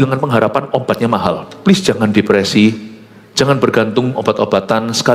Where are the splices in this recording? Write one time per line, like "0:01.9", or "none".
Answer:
0:01.5